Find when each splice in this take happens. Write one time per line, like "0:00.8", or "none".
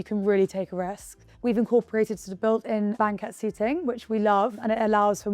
0:01.1
0:02.9